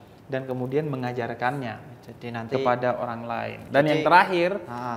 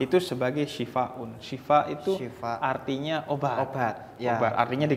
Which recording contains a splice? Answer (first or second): first